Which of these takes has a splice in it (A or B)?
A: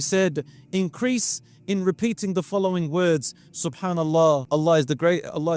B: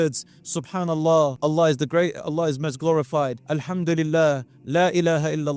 B